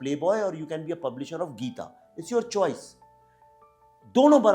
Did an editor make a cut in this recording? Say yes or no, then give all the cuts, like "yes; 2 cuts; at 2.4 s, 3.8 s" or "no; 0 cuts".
no; 0 cuts